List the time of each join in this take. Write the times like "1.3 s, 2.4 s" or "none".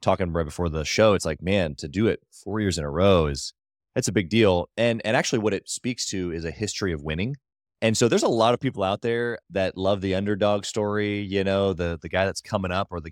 none

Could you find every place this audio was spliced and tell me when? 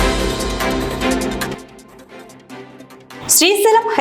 1.4 s

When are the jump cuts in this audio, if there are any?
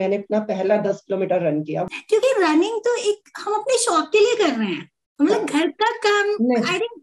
1.8 s

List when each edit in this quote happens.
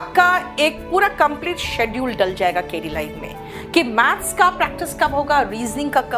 none

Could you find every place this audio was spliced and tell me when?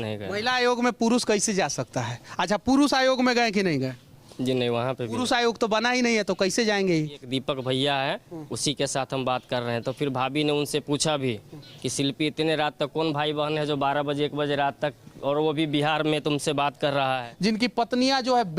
7.3 s, 17.3 s

